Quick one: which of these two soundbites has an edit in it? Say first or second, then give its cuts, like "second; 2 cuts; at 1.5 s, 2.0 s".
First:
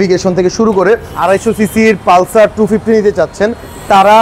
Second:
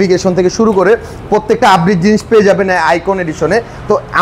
first; 1 cut; at 1.1 s